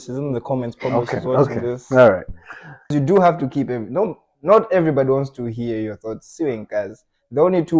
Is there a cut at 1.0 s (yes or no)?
no